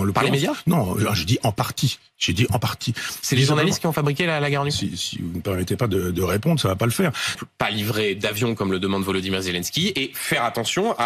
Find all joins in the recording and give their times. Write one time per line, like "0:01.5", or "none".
0:07.4